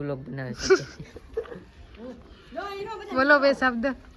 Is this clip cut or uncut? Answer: uncut